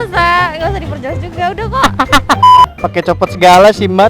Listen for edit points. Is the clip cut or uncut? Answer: cut